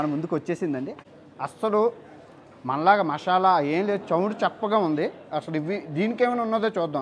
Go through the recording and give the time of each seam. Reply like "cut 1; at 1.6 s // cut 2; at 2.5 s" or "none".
cut 1; at 1.0 s